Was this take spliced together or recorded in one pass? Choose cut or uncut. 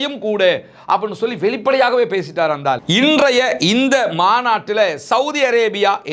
cut